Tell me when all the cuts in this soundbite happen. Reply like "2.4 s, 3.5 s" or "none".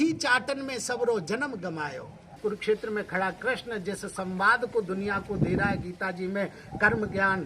2.3 s

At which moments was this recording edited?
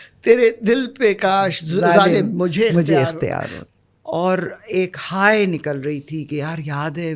3.5 s

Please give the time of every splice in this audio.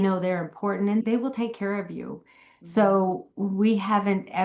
1.0 s

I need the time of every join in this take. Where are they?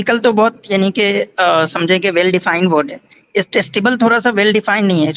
none

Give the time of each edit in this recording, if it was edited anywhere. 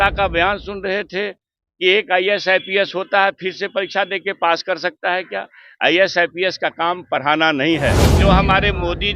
8.1 s

